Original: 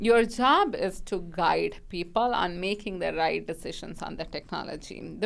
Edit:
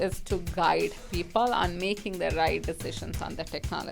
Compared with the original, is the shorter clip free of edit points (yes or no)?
yes